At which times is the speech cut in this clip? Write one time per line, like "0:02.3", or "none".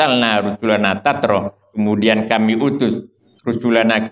none